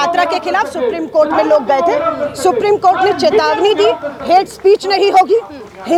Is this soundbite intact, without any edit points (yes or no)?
yes